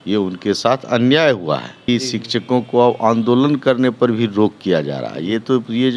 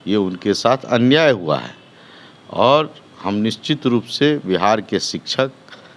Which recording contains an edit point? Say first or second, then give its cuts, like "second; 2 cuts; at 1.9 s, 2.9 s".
first; 1 cut; at 1.9 s